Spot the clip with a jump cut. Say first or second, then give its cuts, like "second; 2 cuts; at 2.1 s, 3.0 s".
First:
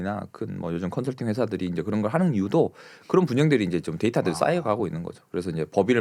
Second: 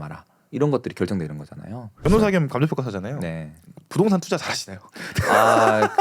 second; 1 cut; at 1.9 s